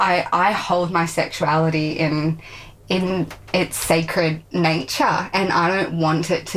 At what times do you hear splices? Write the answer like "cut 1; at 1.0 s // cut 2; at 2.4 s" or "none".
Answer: none